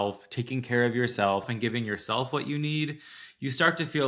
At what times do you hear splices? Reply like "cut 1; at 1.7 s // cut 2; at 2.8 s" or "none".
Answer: cut 1; at 1.5 s